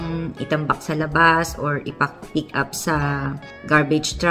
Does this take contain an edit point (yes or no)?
no